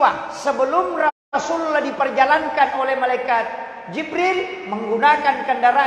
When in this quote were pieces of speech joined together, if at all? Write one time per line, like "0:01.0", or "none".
none

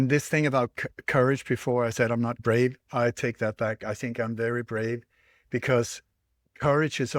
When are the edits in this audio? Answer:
none

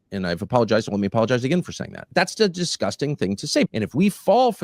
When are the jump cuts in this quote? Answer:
0:02.0
0:03.7

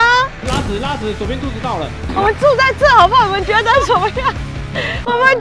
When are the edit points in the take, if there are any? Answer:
none

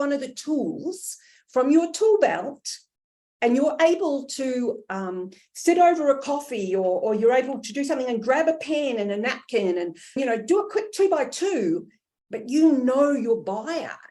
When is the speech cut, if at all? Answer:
0:10.2

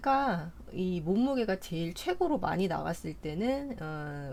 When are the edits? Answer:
none

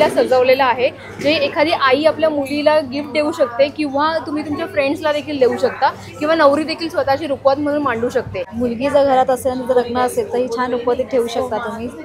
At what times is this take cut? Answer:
0:08.4

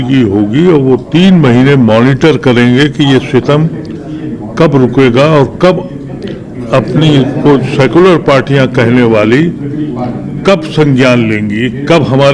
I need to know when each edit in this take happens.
none

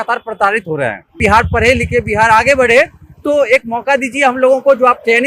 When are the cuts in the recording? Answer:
0:01.1

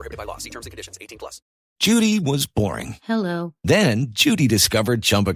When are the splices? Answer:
0:01.6

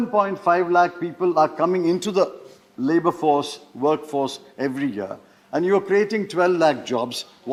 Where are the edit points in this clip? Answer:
none

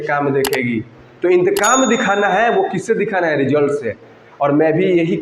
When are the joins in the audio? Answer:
none

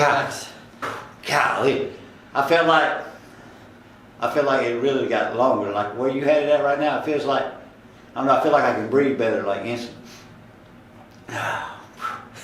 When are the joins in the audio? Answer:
0:00.9

